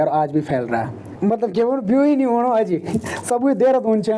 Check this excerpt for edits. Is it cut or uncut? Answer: cut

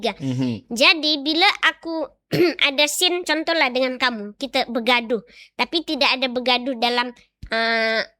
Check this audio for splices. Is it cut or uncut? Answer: uncut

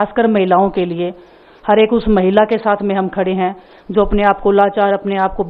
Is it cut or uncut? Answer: uncut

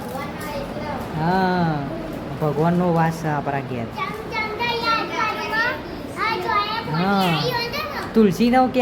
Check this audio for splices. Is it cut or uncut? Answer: uncut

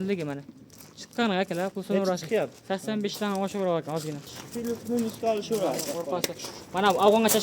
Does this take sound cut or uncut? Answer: cut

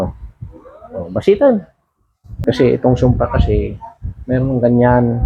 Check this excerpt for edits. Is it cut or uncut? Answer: cut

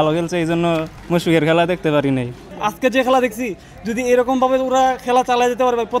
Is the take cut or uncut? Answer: cut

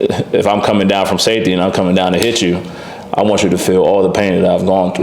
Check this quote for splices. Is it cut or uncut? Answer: uncut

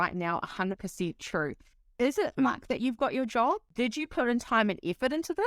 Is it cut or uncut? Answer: cut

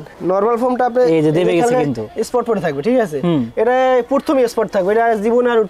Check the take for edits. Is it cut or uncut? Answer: uncut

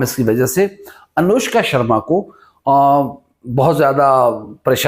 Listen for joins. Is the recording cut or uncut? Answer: uncut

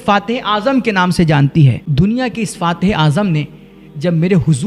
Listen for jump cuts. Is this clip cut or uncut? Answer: cut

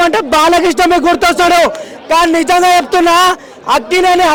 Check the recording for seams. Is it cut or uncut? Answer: uncut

